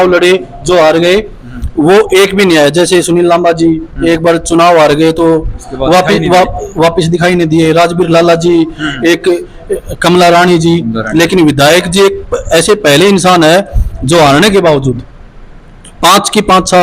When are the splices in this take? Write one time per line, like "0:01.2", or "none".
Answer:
none